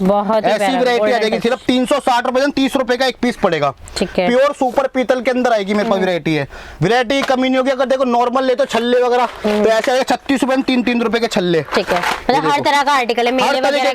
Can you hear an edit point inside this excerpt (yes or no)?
no